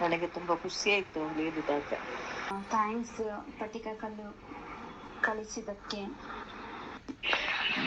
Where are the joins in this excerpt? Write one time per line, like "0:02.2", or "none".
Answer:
0:02.5